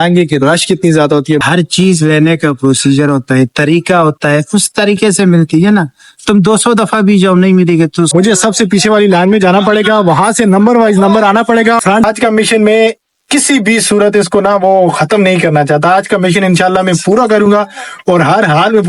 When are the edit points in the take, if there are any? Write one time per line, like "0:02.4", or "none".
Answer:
0:01.4
0:08.1
0:12.1